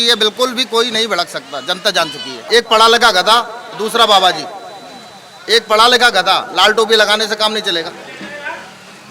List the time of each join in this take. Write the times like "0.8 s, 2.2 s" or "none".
2.4 s